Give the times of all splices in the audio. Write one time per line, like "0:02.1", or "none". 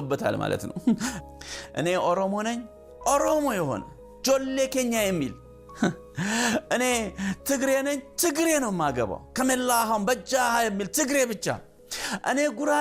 0:01.2